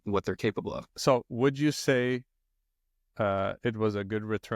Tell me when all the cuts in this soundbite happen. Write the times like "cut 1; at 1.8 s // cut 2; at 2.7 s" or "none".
cut 1; at 0.9 s